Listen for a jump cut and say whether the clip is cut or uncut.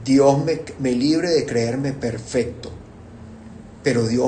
uncut